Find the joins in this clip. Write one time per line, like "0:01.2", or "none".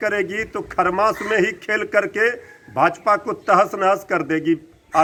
none